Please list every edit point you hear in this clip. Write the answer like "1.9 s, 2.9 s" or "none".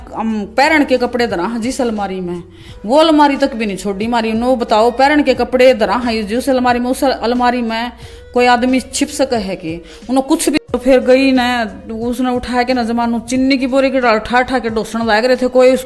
10.7 s